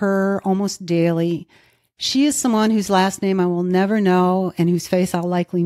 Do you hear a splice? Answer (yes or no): no